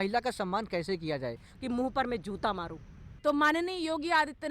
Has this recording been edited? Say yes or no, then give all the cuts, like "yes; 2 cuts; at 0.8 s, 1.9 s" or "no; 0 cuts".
yes; 2 cuts; at 1.5 s, 3.0 s